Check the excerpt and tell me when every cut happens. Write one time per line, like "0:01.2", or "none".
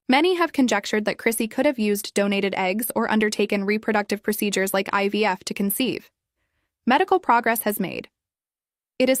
none

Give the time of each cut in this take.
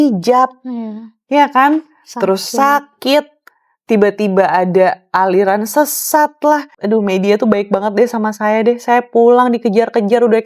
0:06.8

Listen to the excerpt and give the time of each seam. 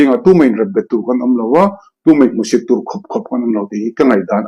none

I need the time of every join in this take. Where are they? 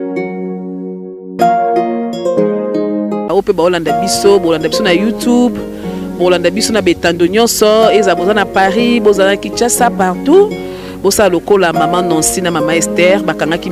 0:01.2

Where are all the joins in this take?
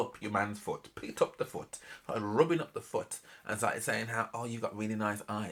none

